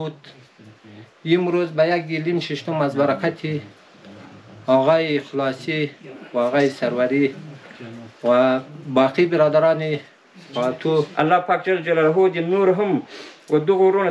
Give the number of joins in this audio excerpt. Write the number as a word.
one